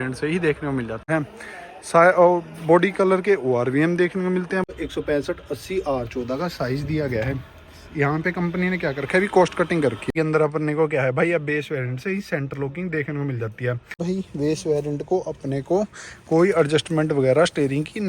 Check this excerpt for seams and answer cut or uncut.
cut